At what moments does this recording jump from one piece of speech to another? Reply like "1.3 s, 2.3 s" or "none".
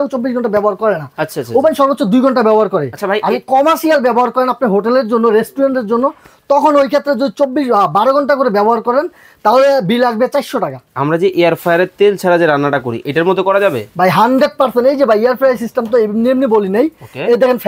10.8 s